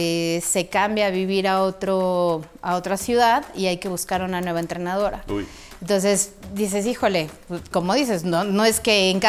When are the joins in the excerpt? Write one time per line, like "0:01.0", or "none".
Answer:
none

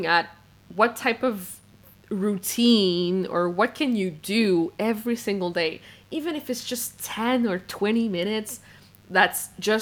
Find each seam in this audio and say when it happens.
none

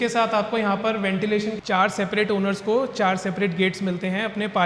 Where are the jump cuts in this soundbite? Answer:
0:01.6

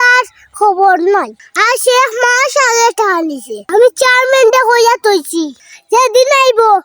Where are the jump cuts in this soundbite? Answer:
0:03.6

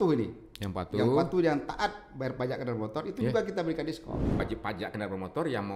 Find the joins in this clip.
0:04.4

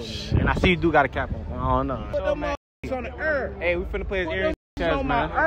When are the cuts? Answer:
0:02.0

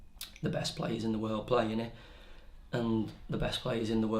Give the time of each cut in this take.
0:02.5

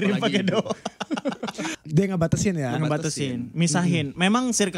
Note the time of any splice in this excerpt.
0:01.7

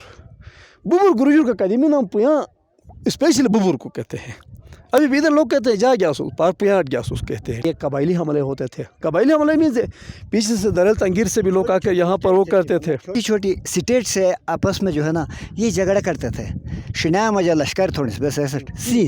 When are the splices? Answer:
0:07.6
0:13.1

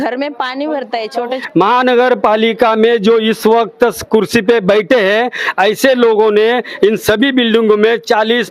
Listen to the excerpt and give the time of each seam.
0:01.4

